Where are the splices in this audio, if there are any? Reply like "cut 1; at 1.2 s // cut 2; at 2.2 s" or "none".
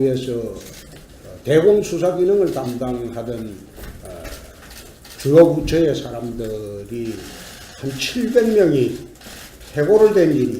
cut 1; at 3.9 s